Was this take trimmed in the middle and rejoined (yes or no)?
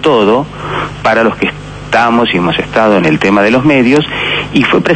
no